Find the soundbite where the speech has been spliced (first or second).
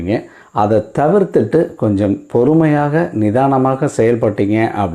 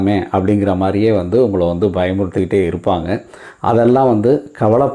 first